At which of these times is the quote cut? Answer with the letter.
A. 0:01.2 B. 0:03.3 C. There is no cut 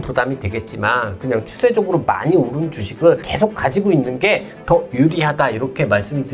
B